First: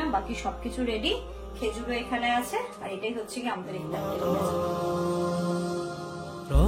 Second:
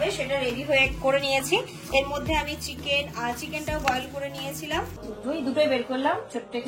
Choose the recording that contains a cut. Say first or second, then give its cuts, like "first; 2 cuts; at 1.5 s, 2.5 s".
second; 1 cut; at 5.0 s